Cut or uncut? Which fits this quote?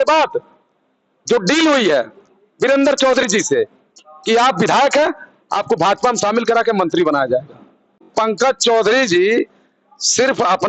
cut